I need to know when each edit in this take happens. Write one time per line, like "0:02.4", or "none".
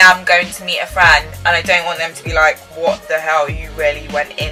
none